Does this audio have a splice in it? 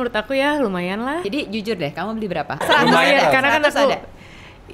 yes; 2 cuts; at 1.3 s, 2.6 s

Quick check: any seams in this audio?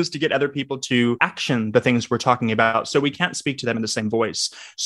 yes; 2 cuts; at 1.3 s, 2.7 s

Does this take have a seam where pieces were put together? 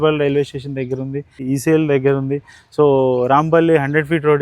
yes; 1 cut; at 1.4 s

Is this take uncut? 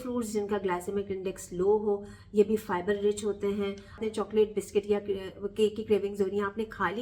no; 1 cut; at 4.0 s

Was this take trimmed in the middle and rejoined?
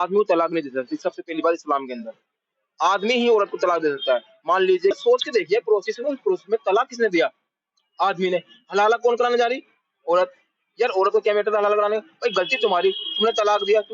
yes; 1 cut; at 5.0 s

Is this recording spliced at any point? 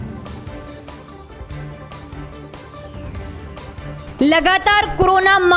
yes; 1 cut; at 1.2 s

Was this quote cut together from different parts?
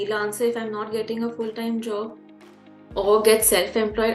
no; 0 cuts

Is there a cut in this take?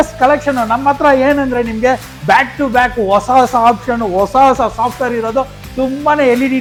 no; 0 cuts

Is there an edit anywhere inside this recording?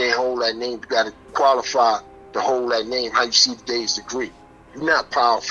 yes; 1 cut; at 1.2 s

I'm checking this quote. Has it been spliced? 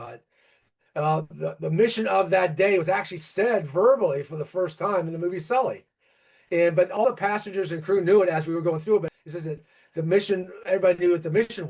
yes; 1 cut; at 9.1 s

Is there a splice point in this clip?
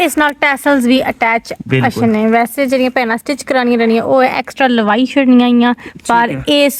no; 0 cuts

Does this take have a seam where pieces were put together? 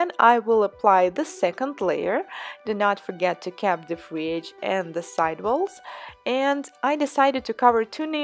no; 0 cuts

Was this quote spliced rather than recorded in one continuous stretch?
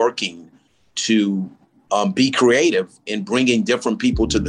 no; 0 cuts

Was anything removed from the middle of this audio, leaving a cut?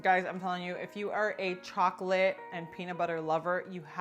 no; 0 cuts

